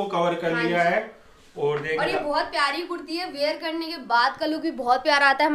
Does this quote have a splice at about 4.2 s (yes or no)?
no